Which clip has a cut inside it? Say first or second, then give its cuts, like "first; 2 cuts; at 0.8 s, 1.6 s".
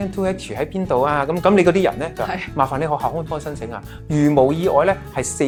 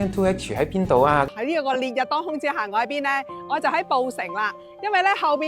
second; 1 cut; at 1.3 s